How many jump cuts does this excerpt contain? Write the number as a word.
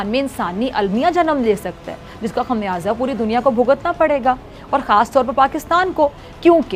zero